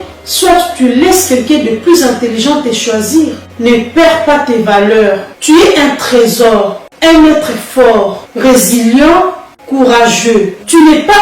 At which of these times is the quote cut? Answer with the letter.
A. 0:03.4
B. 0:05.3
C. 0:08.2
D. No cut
B